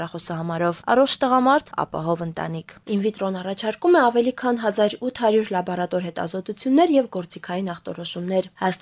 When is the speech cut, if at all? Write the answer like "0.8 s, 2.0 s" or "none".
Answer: 2.8 s